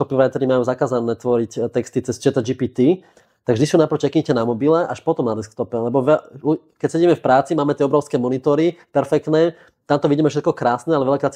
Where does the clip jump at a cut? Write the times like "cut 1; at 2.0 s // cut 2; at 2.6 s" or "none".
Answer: cut 1; at 3.2 s